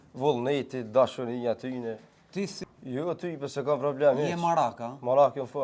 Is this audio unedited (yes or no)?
no